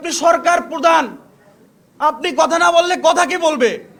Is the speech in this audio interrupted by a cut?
no; 0 cuts

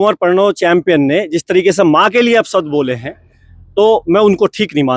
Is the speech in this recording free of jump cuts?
yes; 0 cuts

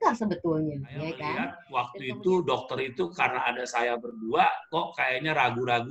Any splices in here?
yes; 1 cut; at 1.6 s

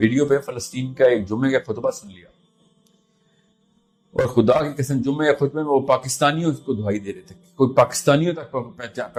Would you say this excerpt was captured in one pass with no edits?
yes; 0 cuts

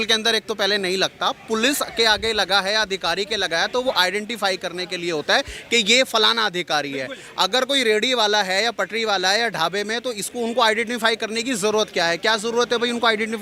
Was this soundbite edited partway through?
no; 0 cuts

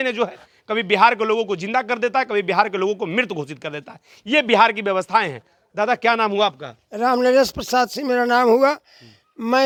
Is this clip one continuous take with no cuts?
yes; 0 cuts

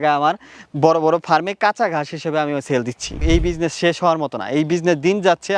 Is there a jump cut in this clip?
no; 0 cuts

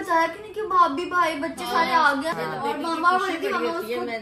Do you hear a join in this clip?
yes; 1 cut; at 2.3 s

